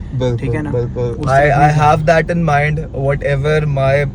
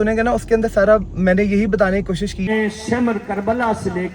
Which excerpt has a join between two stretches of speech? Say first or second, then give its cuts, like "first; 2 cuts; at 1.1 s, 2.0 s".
second; 1 cut; at 2.5 s